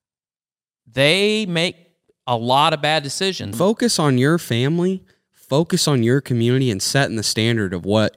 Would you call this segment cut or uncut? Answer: cut